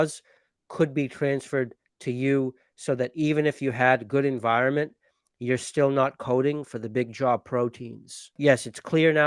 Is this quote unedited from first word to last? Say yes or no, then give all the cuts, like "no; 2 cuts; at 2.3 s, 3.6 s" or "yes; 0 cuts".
no; 1 cut; at 8.3 s